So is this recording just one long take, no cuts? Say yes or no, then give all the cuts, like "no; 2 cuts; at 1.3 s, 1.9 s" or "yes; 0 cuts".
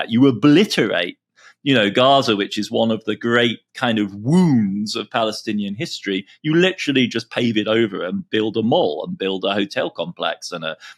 yes; 0 cuts